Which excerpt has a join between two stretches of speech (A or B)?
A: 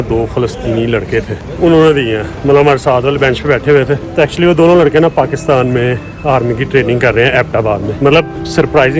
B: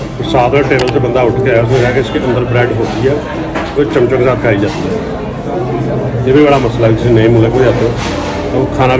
A